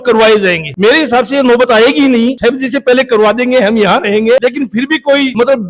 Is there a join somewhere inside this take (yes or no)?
no